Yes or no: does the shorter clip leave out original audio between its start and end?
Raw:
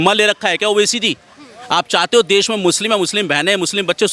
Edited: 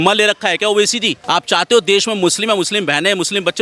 yes